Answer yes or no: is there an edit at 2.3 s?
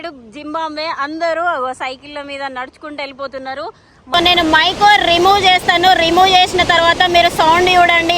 no